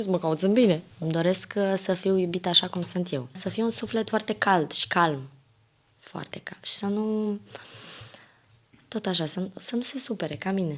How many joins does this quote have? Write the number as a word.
two